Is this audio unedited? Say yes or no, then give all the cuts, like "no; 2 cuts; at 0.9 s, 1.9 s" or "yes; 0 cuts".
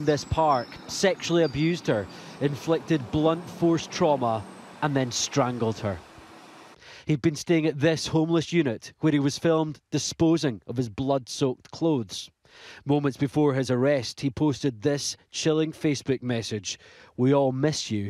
no; 1 cut; at 10.1 s